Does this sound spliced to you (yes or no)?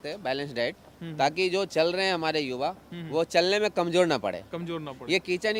no